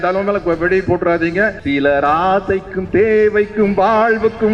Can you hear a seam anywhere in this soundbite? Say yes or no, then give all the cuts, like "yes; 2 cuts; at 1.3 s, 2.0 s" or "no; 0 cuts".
yes; 1 cut; at 1.6 s